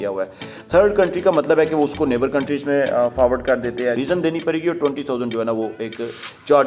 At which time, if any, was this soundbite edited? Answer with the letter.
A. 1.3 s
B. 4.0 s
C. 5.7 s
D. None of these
B